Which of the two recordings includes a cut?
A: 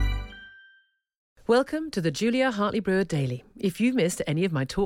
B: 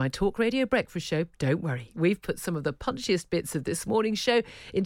A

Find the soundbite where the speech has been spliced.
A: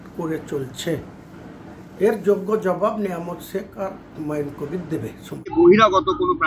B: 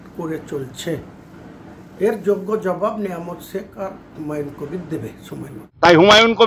B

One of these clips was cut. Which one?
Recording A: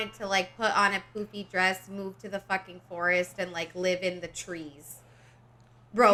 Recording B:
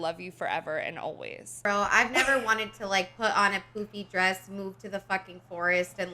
B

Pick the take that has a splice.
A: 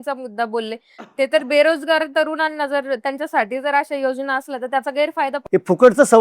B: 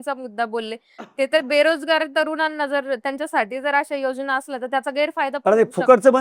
A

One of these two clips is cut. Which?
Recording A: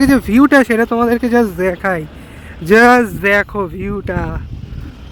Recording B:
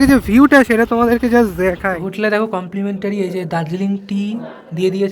B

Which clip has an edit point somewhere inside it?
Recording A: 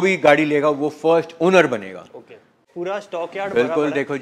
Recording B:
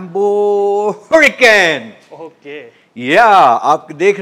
A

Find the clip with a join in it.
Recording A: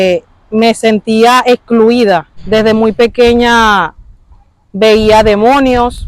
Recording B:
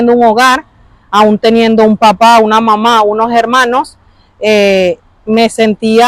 A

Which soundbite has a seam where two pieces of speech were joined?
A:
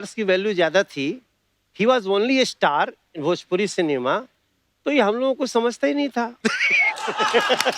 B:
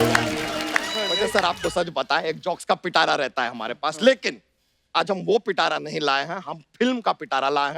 B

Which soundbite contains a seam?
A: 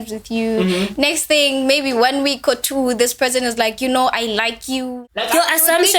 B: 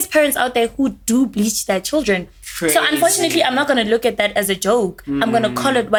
A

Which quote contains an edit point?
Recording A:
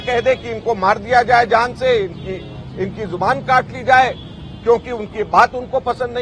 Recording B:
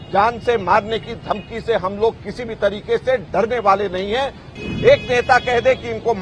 B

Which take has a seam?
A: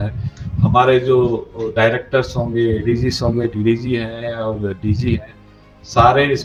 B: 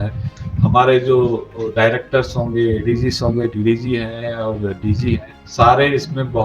B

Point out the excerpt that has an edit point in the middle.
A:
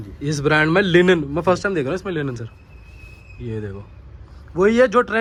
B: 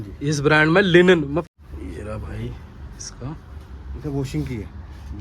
B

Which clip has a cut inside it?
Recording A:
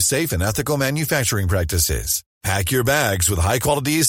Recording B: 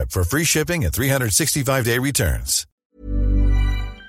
B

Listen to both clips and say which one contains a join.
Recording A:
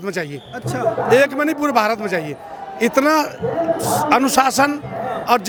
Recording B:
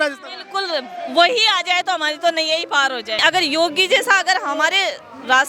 B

